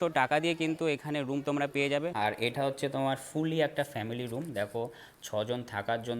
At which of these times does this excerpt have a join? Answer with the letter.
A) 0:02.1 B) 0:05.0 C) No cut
A